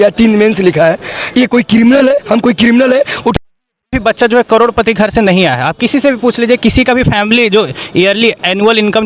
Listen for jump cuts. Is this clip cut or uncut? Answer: cut